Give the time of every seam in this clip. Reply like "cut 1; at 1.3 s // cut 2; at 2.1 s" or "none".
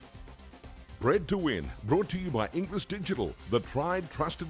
cut 1; at 1.0 s